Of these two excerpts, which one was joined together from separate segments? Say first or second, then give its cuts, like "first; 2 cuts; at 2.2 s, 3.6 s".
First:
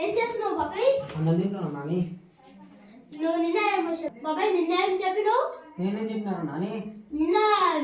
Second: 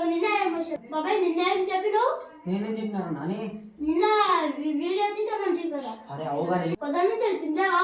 second; 1 cut; at 6.8 s